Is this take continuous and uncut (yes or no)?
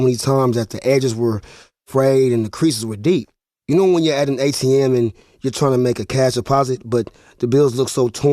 yes